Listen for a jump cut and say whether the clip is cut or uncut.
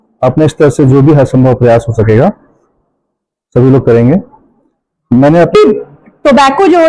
cut